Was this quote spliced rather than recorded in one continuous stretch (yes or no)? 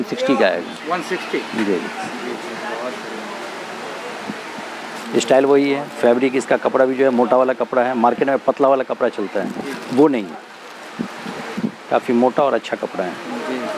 yes